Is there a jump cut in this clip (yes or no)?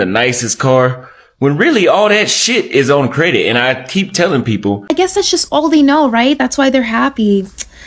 yes